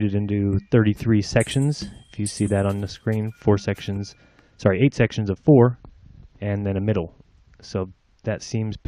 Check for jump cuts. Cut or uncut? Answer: cut